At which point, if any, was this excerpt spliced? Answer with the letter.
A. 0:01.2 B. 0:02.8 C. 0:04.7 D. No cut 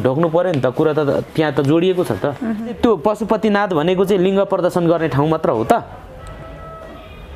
B